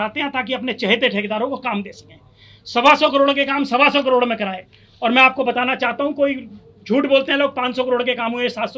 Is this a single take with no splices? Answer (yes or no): yes